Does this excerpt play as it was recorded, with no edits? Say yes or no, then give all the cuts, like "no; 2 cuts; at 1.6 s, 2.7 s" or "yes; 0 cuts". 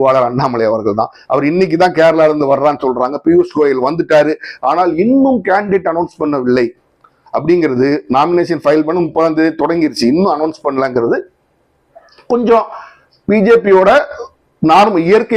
yes; 0 cuts